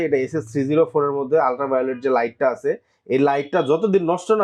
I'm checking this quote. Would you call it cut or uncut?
uncut